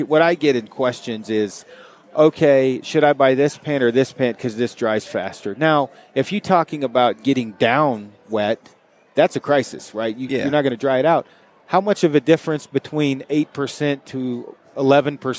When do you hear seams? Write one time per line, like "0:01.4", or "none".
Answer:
none